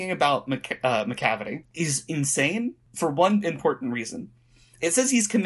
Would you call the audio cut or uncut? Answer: cut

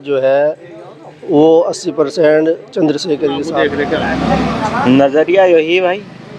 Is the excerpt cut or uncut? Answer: cut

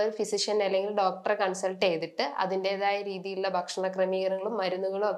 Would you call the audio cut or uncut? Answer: uncut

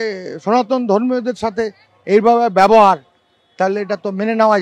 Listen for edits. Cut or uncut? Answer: uncut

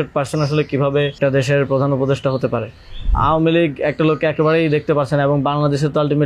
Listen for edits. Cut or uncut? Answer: cut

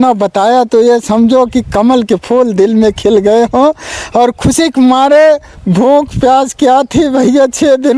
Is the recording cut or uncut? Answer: uncut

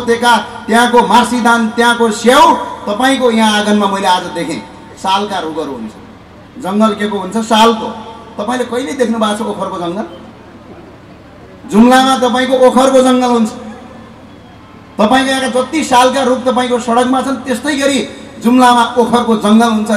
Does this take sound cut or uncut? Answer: uncut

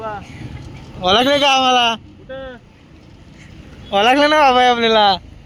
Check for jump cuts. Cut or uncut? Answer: uncut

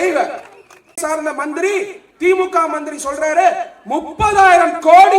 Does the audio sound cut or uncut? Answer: cut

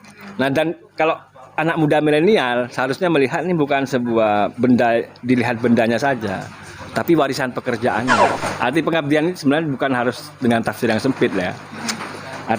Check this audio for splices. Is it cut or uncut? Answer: cut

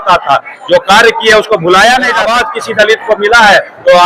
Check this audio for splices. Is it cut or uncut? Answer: cut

